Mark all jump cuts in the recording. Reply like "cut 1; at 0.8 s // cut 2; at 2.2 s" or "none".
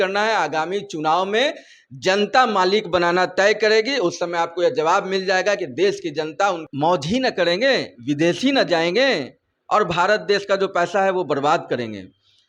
cut 1; at 6.6 s